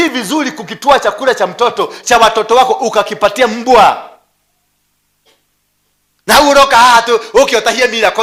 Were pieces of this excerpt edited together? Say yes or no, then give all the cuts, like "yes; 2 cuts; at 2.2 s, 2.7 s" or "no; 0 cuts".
no; 0 cuts